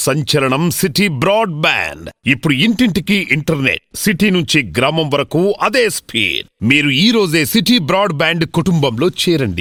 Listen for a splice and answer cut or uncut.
uncut